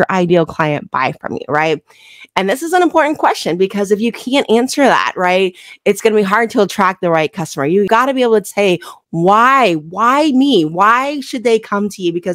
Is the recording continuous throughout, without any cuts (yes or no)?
yes